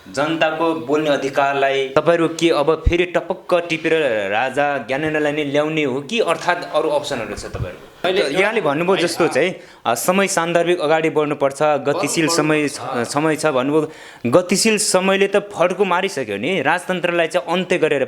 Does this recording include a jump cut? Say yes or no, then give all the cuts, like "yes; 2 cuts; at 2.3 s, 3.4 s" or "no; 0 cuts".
yes; 2 cuts; at 1.9 s, 8.1 s